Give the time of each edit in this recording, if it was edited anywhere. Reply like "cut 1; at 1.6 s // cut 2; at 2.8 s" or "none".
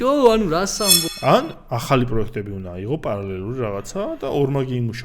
cut 1; at 1.1 s